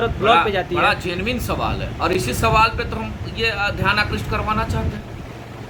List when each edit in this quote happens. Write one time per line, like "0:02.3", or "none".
none